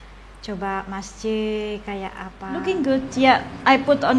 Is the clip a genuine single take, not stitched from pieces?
no; 1 cut; at 2.5 s

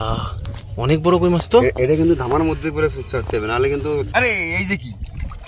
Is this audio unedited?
no; 1 cut; at 4.1 s

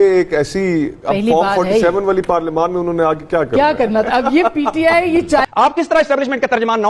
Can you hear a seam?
yes; 1 cut; at 5.4 s

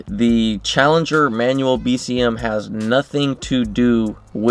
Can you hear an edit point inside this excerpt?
no; 0 cuts

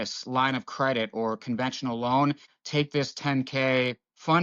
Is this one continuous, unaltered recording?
no; 1 cut; at 2.5 s

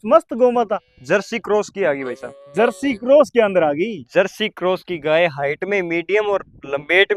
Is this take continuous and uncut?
yes; 0 cuts

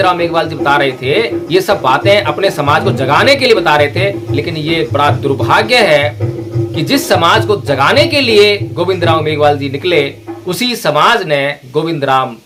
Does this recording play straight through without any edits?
yes; 0 cuts

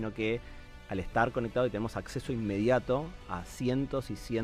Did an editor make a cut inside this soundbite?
no; 0 cuts

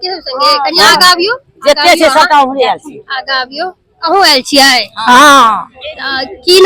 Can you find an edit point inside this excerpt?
no; 0 cuts

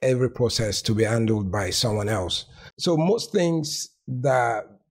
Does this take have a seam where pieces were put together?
yes; 1 cut; at 2.8 s

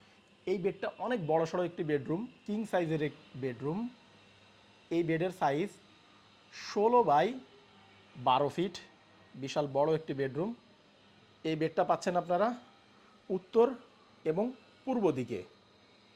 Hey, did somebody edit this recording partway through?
no; 0 cuts

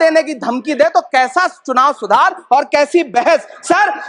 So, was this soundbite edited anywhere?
no; 0 cuts

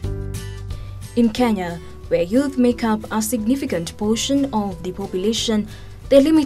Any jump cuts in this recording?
no; 0 cuts

